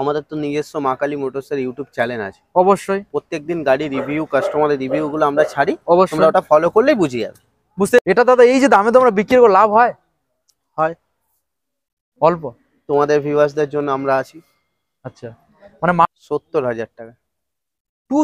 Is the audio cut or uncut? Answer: cut